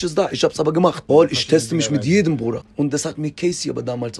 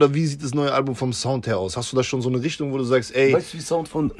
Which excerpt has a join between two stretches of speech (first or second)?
first